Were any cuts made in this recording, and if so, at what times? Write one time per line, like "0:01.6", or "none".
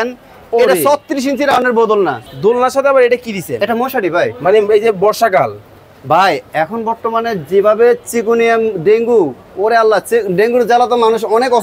0:02.2